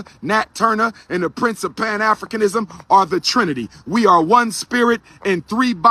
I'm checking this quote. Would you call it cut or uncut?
uncut